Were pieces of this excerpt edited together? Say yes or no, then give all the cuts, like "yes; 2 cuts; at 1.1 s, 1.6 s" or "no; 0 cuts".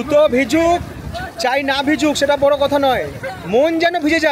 no; 0 cuts